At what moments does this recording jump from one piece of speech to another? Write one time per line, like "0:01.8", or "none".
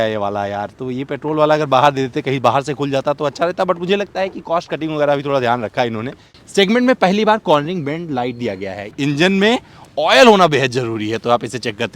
0:06.4
0:08.9